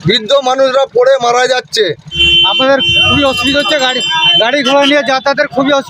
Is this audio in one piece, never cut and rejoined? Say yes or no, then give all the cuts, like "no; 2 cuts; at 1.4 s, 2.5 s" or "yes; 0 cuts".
no; 1 cut; at 2.2 s